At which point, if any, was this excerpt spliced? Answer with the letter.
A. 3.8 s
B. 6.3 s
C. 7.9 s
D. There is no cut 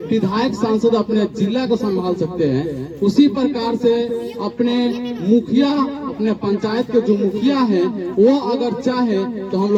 D